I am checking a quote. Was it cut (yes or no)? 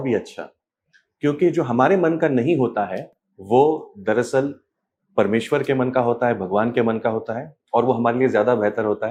no